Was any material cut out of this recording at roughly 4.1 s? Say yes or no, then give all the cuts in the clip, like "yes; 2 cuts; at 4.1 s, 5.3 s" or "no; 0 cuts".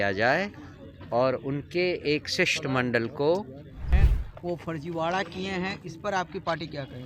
yes; 1 cut; at 4.1 s